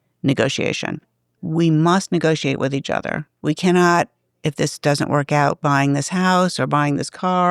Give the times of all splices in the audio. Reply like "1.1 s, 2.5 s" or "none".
1.3 s, 3.3 s